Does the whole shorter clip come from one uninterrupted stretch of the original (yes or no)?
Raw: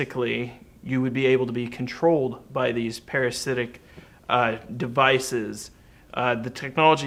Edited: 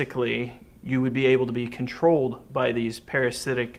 yes